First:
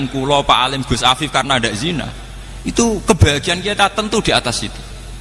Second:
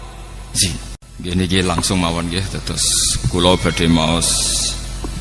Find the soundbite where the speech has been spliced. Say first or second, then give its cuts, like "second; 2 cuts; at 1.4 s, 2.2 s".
second; 1 cut; at 1.0 s